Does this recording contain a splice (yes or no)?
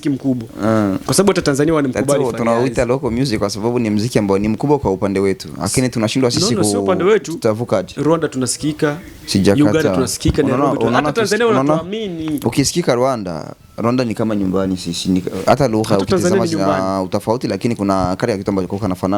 no